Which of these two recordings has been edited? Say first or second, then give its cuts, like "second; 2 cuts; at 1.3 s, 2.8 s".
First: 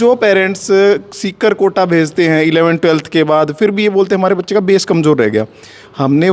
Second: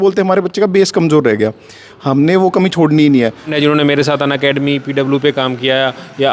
second; 1 cut; at 3.5 s